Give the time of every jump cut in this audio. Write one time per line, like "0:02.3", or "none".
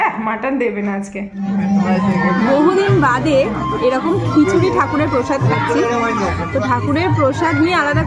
0:01.5